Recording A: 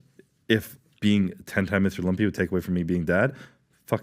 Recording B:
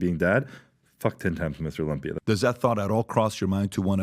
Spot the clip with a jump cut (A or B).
B